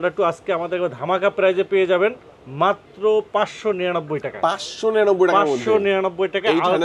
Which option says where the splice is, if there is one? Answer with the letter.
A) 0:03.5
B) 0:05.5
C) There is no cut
C